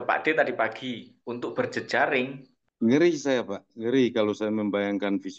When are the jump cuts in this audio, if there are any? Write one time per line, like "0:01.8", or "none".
0:02.5

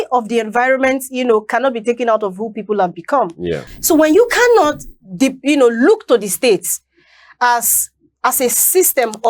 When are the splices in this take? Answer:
0:03.6

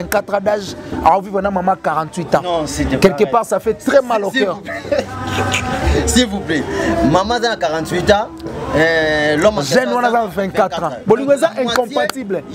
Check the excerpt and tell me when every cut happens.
none

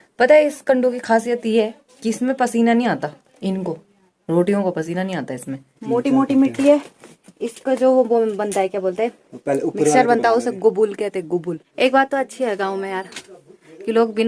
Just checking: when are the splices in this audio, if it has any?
0:05.7
0:11.6

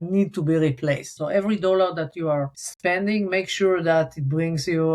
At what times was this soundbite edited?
0:01.1
0:02.6

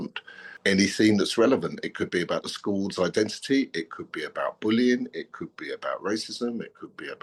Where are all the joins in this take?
none

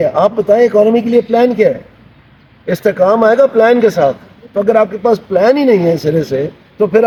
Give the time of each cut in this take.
none

